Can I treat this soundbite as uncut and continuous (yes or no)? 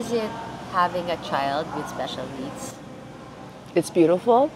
yes